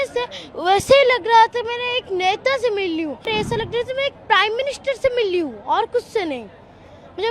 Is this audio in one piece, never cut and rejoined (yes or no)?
no